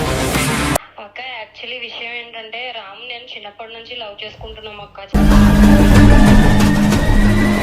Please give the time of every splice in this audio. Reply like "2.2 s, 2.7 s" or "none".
0.8 s, 5.1 s